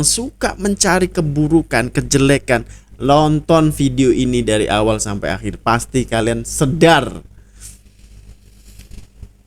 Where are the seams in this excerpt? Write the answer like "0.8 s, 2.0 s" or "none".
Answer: none